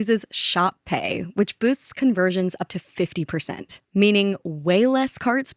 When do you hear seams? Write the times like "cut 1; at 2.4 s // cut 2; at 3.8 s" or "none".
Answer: none